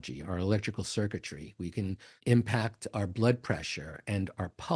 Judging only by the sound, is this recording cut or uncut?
cut